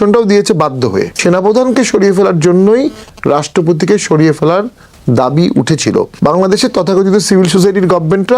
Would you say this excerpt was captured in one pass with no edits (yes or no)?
no